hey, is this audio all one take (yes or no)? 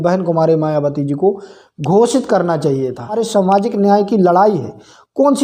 no